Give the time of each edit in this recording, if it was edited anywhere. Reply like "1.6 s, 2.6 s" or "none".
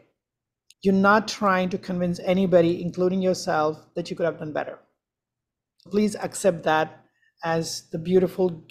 5.9 s